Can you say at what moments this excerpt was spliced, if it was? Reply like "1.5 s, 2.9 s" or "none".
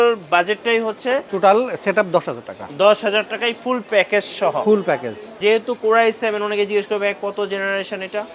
1.3 s, 5.4 s